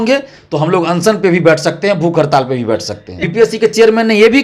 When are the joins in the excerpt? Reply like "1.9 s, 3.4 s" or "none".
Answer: 3.2 s